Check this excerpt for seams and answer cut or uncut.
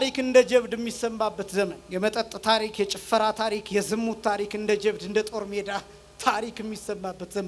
cut